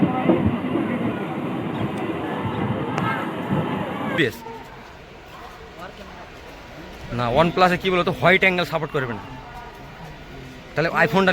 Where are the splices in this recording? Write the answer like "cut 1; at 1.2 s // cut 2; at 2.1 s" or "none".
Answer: cut 1; at 4.2 s

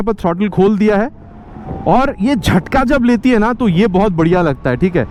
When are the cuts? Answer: none

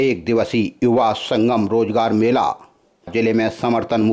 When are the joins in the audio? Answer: cut 1; at 3.1 s

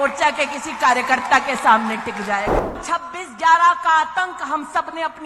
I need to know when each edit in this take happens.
cut 1; at 2.8 s

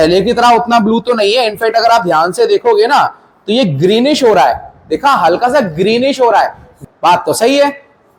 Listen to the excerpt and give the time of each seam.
cut 1; at 6.8 s

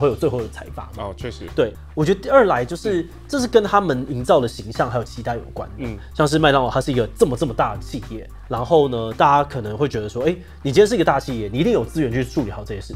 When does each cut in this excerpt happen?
none

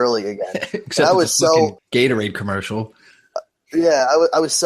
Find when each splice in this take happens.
cut 1; at 1.8 s

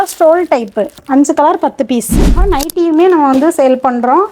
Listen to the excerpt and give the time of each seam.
cut 1; at 1.0 s // cut 2; at 2.4 s

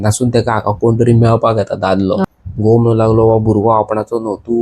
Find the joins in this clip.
cut 1; at 2.2 s

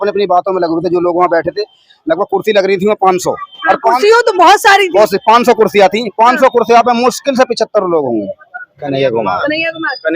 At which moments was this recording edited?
cut 1; at 8.8 s

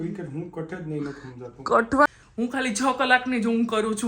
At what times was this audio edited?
cut 1; at 2.1 s

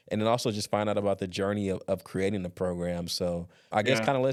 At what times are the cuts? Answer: none

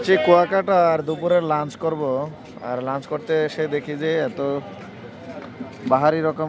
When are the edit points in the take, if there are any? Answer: none

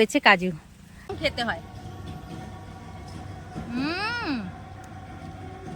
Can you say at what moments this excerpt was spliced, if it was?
cut 1; at 1.1 s

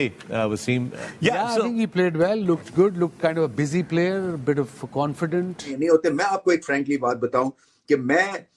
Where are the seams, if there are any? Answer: cut 1; at 1.0 s // cut 2; at 5.7 s

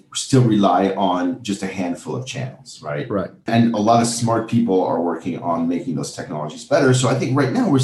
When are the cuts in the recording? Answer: cut 1; at 3.5 s

